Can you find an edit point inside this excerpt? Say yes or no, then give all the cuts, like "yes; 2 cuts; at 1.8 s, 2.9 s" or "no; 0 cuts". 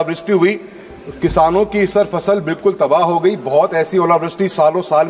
no; 0 cuts